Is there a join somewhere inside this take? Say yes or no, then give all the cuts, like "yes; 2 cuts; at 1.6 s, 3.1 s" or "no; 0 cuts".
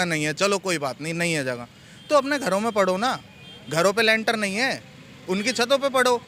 no; 0 cuts